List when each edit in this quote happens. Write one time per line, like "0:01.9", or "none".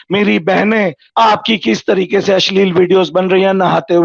0:01.0